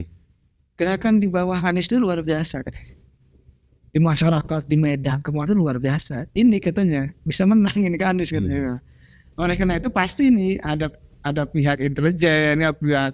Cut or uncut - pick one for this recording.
uncut